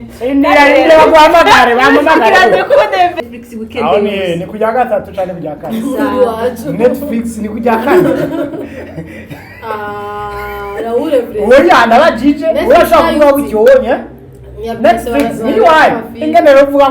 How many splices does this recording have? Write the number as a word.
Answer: one